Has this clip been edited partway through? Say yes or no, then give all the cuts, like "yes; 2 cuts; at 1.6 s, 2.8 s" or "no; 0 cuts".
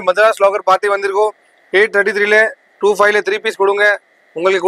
no; 0 cuts